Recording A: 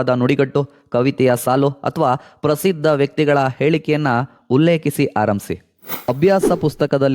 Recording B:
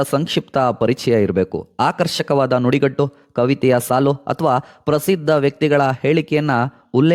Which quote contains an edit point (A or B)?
A